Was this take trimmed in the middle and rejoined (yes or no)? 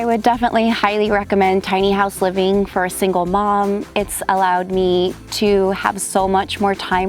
yes